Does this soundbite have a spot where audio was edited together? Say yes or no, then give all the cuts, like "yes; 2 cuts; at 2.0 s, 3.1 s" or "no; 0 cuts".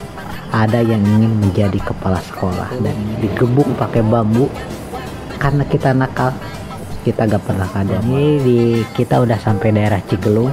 yes; 2 cuts; at 3.0 s, 8.0 s